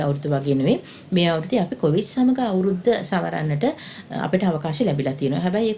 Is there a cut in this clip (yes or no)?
no